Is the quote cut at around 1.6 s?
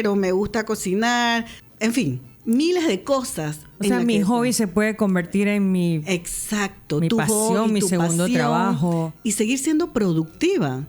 yes; 1 cut; at 1.6 s

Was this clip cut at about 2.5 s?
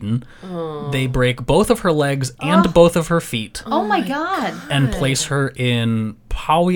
no; 0 cuts

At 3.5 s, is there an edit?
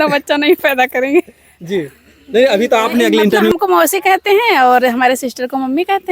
yes; 1 cut; at 3.5 s

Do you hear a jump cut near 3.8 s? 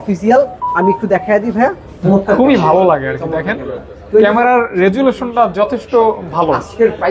no; 1 cut; at 2.1 s

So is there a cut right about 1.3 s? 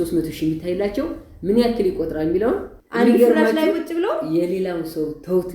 no; 1 cut; at 2.8 s

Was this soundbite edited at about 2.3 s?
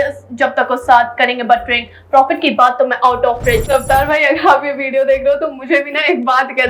no; 1 cut; at 3.6 s

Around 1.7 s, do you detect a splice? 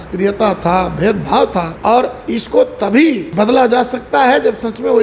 yes; 2 cuts; at 1.7 s, 3.3 s

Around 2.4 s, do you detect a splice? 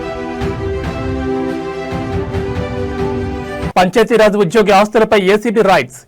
no; 1 cut; at 3.7 s

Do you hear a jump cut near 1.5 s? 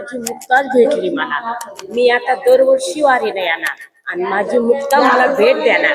no; 0 cuts

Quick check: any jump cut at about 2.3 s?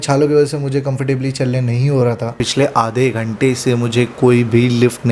yes; 1 cut; at 2.3 s

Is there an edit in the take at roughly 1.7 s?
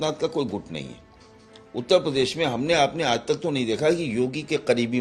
no; 0 cuts

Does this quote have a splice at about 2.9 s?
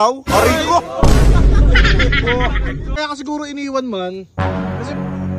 yes; 1 cut; at 2.9 s

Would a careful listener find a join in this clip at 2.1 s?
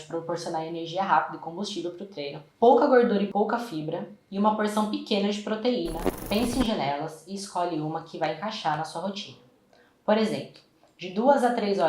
no; 2 cuts; at 3.3 s, 6.1 s

